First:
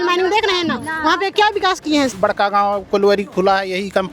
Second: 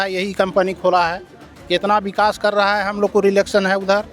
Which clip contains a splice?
first; 1 cut; at 2.1 s

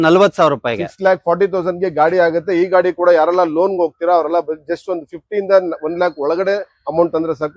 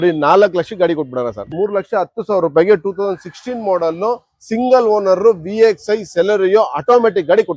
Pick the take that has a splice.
second; 1 cut; at 1.7 s

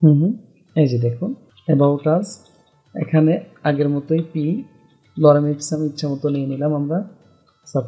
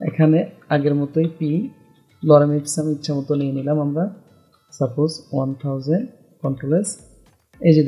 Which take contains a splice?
first; 1 cut; at 1.5 s

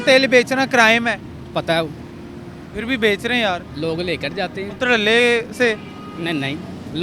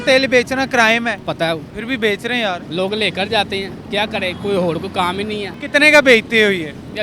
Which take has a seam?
second; 3 cuts; at 1.3 s, 2.6 s, 5.5 s

